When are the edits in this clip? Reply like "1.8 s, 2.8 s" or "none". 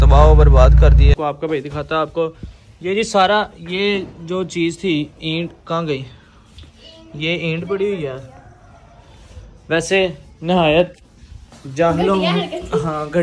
1.1 s